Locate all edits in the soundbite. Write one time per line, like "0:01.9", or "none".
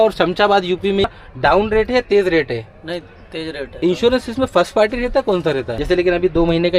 0:01.1
0:03.8
0:05.7